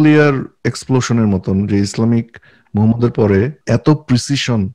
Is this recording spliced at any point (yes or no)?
yes